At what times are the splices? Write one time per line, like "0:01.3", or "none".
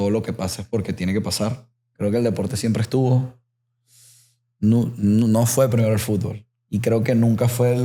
0:01.8

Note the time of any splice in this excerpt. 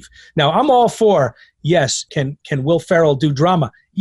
none

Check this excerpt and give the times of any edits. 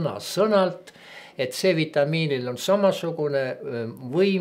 none

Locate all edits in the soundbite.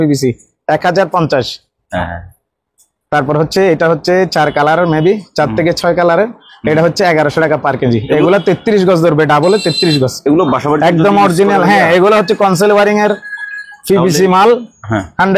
none

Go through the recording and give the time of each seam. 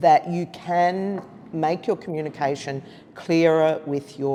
none

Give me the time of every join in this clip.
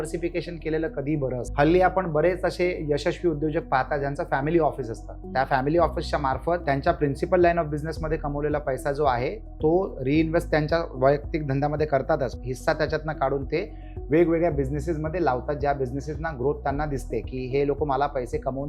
0:01.5
0:06.6
0:12.3

